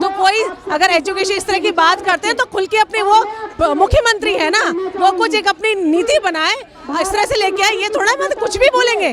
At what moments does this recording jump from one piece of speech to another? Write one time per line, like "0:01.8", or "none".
none